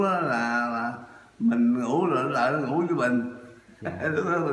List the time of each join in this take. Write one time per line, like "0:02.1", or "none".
none

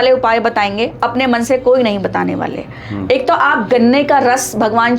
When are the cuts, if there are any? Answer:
none

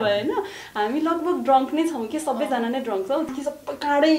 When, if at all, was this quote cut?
0:03.3

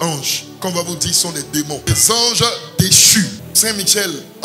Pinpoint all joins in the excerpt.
0:01.9
0:03.4

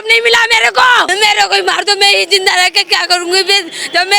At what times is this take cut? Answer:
0:01.1

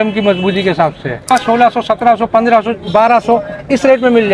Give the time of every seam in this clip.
0:01.3

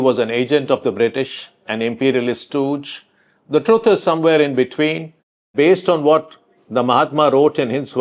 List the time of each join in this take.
0:05.5

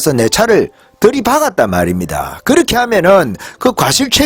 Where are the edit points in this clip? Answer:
none

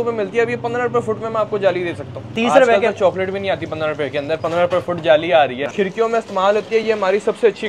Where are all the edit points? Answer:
0:02.3
0:05.7

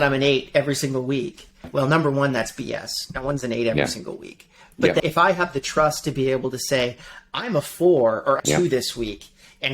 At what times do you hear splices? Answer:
0:01.6
0:05.0
0:08.4

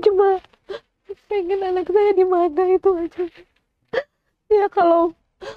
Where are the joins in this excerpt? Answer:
none

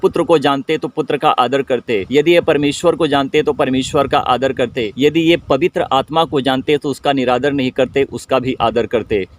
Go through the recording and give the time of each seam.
0:02.1
0:04.9

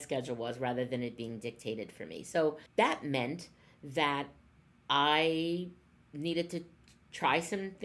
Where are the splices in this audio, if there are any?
0:02.6

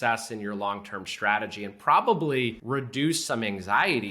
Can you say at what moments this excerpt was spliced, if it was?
0:02.6

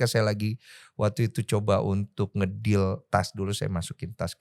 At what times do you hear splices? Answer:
none

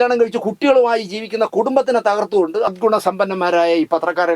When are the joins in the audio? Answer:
0:02.7

